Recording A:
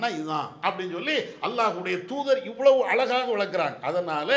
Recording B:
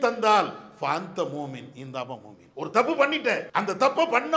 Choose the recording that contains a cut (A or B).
B